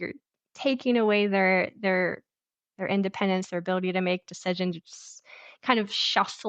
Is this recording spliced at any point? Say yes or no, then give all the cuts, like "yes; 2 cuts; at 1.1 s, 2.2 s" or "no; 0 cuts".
no; 0 cuts